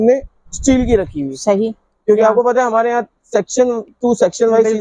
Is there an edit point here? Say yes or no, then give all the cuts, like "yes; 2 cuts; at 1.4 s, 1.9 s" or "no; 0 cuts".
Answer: no; 0 cuts